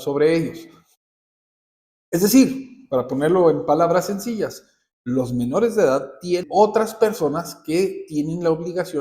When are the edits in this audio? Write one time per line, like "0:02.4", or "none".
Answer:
0:06.5